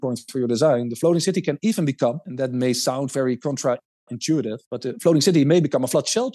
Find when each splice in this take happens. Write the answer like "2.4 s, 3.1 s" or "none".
none